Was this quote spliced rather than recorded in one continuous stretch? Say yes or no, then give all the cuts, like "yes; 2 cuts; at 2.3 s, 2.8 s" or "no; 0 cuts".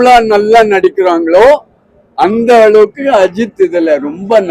no; 0 cuts